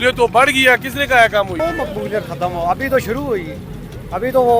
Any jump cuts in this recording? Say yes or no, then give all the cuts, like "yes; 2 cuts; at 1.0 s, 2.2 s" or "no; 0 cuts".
yes; 1 cut; at 1.6 s